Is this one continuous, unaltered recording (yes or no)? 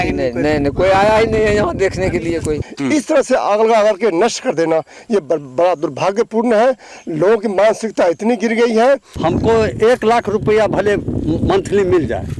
no